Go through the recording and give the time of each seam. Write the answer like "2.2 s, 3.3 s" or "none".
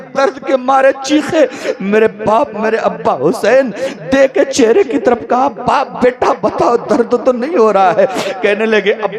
none